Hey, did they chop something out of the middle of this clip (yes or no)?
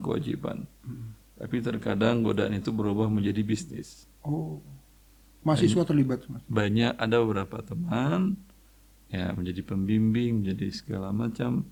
no